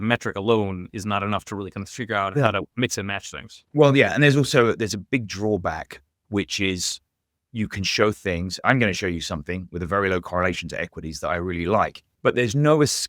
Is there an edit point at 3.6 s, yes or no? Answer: no